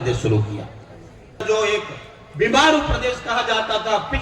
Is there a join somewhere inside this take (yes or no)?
yes